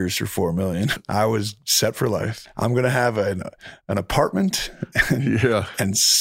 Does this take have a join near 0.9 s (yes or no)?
yes